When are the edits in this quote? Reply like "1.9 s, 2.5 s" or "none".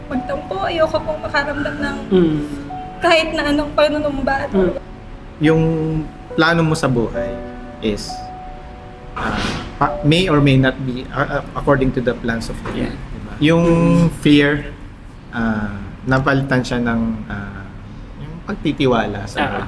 4.8 s, 13.2 s